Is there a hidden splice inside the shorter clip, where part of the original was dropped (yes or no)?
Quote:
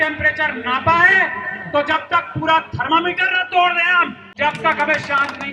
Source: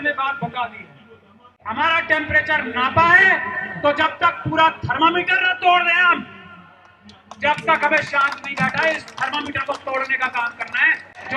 yes